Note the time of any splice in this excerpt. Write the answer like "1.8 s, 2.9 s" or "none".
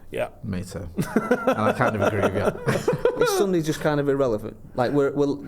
2.7 s